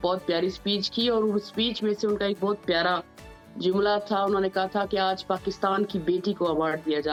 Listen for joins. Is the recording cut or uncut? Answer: uncut